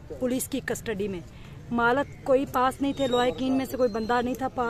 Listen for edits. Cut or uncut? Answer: uncut